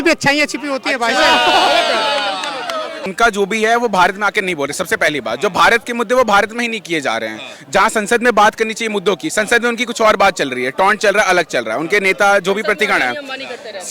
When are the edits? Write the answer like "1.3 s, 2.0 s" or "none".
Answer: none